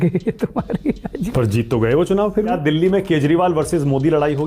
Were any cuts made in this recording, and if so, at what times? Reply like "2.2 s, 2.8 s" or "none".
1.1 s, 2.6 s